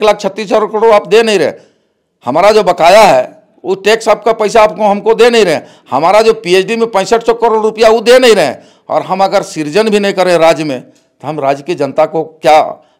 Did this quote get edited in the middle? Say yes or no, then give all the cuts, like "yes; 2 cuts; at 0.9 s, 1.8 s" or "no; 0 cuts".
no; 0 cuts